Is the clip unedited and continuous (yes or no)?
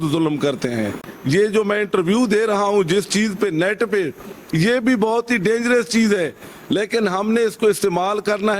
no